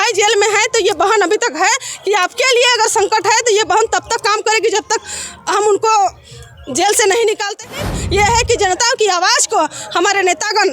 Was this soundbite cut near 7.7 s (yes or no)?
yes